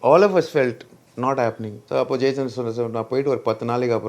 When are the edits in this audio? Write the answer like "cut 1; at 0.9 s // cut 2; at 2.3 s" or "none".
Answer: cut 1; at 1.7 s